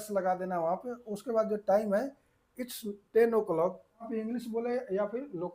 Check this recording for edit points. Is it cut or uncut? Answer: cut